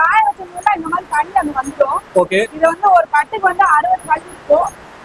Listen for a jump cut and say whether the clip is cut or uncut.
uncut